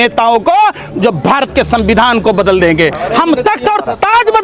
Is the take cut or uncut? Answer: uncut